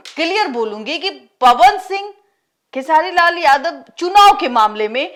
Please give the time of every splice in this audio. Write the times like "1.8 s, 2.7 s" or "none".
none